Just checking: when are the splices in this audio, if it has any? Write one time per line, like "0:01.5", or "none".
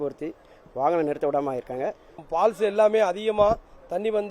0:02.2